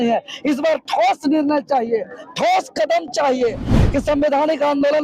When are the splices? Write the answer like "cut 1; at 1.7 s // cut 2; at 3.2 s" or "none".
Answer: cut 1; at 3.7 s